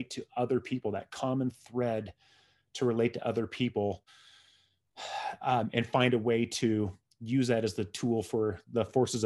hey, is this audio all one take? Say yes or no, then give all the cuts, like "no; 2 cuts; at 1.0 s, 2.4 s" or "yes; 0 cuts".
yes; 0 cuts